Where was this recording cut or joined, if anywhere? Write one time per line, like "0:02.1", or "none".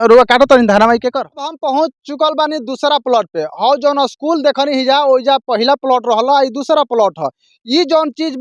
0:01.6